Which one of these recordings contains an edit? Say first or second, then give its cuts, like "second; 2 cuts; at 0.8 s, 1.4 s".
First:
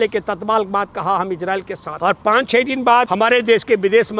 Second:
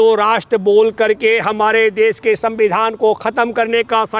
first; 2 cuts; at 1.8 s, 3.1 s